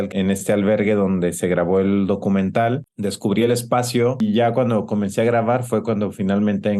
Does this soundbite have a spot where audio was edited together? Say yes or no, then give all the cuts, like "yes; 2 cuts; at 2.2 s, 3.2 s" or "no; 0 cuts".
yes; 1 cut; at 4.2 s